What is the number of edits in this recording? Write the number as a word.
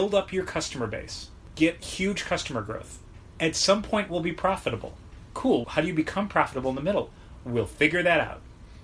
two